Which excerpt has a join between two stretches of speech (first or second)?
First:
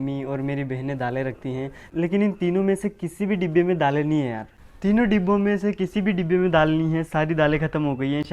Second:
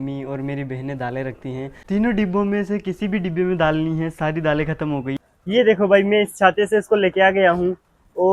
second